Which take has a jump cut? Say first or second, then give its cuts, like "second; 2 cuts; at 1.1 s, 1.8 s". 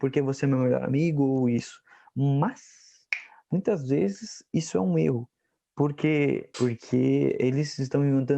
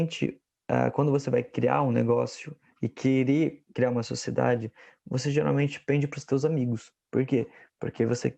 first; 1 cut; at 6.5 s